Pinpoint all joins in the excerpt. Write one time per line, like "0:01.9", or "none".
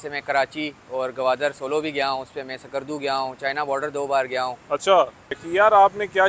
0:05.3